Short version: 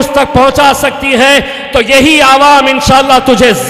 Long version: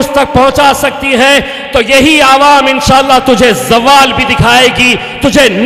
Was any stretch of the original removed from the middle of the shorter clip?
no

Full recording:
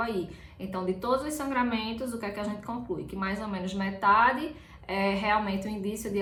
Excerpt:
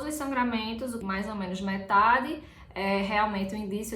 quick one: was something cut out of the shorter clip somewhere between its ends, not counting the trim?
yes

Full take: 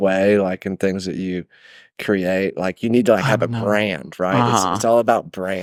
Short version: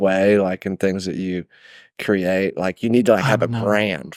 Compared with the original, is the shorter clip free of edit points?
yes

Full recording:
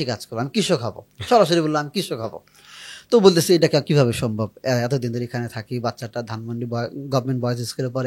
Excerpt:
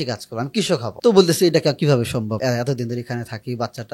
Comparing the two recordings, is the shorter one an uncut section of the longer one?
no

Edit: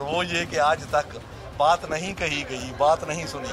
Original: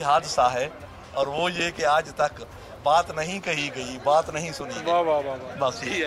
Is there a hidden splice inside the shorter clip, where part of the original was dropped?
no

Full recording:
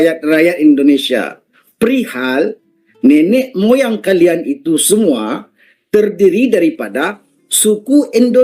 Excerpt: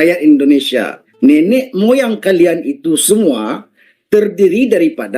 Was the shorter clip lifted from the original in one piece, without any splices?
no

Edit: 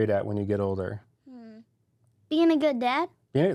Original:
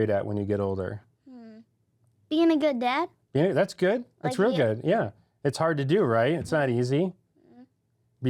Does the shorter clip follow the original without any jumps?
yes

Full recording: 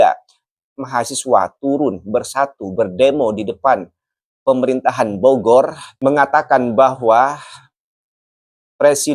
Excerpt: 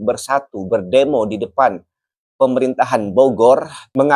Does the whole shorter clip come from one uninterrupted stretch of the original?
yes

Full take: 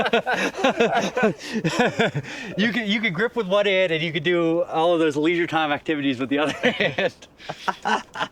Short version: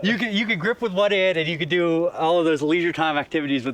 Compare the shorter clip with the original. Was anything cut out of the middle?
no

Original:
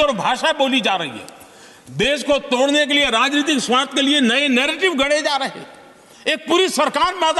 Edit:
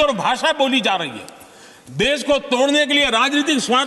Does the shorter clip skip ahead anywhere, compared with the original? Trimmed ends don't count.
no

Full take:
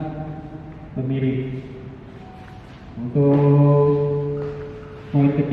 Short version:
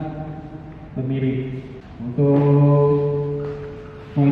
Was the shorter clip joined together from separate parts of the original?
yes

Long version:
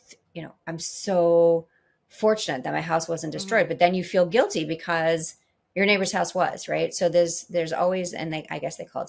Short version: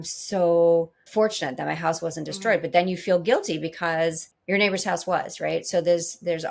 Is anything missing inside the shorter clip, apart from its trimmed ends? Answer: yes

